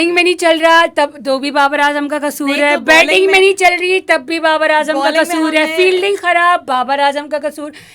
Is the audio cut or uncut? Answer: uncut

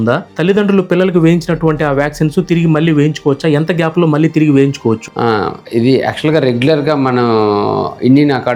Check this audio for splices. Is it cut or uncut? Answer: uncut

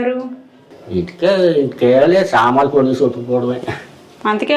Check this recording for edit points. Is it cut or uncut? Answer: uncut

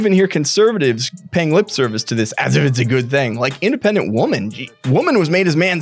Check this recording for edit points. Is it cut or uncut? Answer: cut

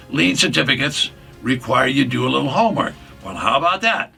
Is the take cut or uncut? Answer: uncut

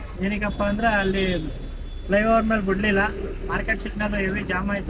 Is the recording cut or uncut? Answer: uncut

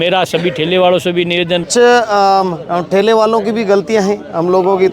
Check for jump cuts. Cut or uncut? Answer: cut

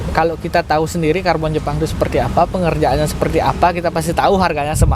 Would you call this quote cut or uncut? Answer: uncut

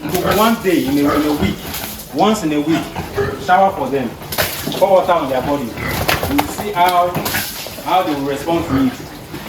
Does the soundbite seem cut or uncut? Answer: uncut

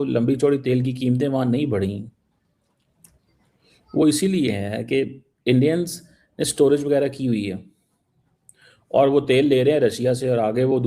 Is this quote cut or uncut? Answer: uncut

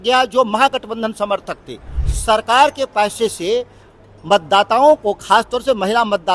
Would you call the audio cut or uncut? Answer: cut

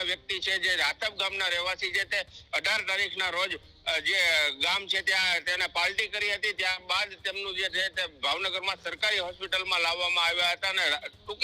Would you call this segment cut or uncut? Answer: uncut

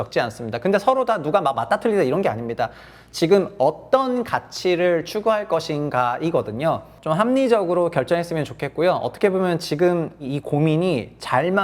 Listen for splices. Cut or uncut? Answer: cut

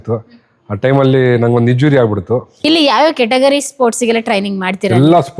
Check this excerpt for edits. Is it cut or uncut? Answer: cut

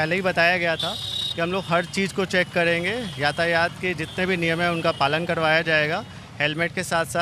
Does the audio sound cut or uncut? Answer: uncut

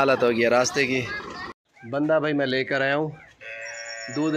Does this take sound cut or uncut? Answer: cut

